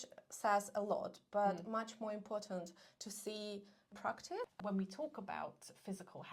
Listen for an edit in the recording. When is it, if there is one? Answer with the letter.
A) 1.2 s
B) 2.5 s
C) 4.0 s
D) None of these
C